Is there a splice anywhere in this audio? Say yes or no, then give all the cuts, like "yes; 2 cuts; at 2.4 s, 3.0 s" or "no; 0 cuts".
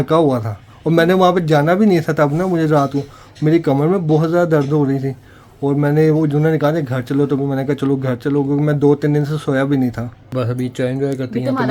yes; 1 cut; at 10.2 s